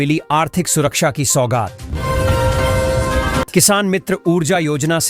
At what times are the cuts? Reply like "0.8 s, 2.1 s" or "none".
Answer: 1.9 s, 3.5 s